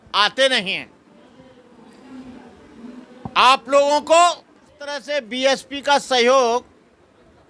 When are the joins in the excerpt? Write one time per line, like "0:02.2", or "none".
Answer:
0:05.0